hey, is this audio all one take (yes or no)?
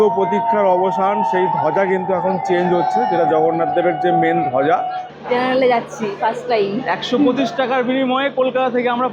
no